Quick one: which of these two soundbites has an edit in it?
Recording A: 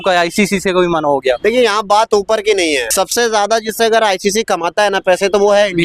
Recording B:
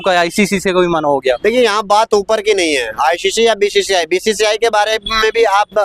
A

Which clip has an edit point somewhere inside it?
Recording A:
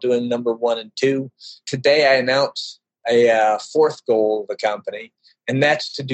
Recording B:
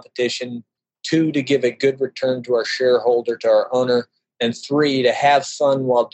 A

